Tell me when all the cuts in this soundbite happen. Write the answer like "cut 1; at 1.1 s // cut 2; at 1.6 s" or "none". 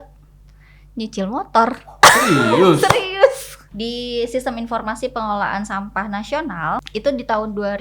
cut 1; at 3.7 s // cut 2; at 6.8 s

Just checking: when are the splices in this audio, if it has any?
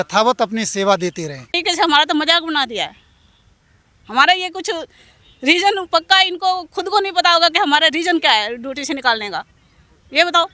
cut 1; at 1.6 s

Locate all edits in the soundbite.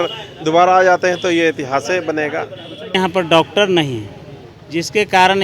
cut 1; at 2.9 s

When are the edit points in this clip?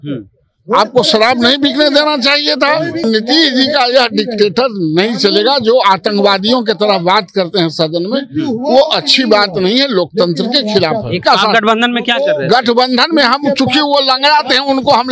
cut 1; at 3.0 s // cut 2; at 11.2 s

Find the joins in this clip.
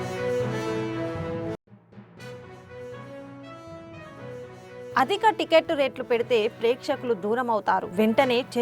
cut 1; at 4.1 s

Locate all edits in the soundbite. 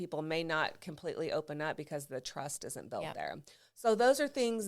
none

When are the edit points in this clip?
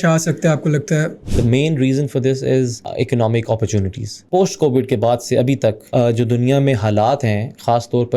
cut 1; at 1.2 s // cut 2; at 2.8 s // cut 3; at 4.2 s // cut 4; at 5.8 s

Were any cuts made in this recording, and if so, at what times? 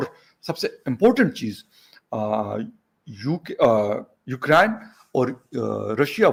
none

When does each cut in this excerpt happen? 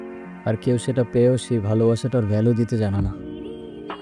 cut 1; at 3.1 s

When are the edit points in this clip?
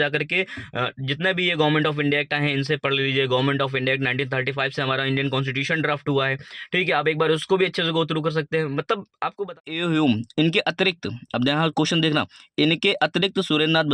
cut 1; at 9.5 s

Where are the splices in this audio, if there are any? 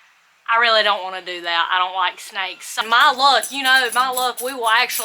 cut 1; at 2.8 s

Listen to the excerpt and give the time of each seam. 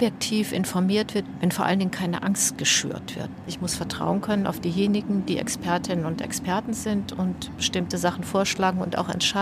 cut 1; at 1.2 s // cut 2; at 3.4 s

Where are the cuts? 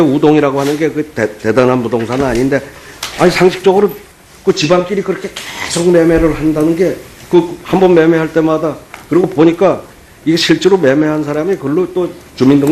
cut 1; at 8.2 s

